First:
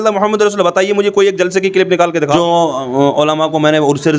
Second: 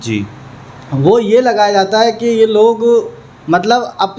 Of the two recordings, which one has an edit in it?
first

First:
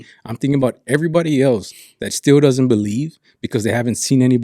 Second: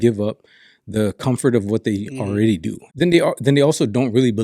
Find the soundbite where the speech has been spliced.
second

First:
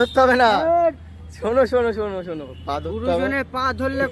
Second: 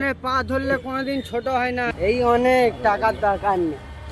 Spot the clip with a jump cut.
second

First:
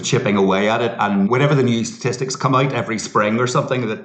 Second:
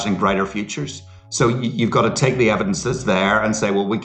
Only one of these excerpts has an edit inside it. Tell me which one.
first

